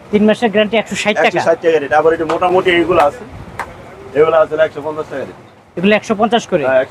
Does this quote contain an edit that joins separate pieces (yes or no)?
no